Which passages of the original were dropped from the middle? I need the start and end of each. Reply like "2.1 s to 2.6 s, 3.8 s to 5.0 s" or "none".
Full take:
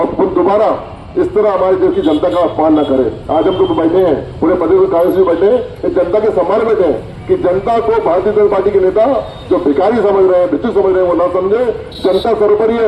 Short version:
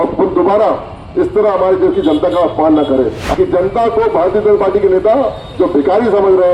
3.2 s to 7.1 s